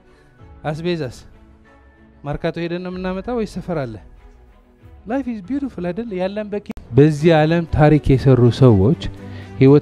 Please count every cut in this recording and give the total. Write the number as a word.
one